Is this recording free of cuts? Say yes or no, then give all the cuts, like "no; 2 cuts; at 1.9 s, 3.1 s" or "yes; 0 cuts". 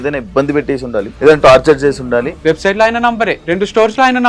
no; 3 cuts; at 1.1 s, 2.3 s, 3.4 s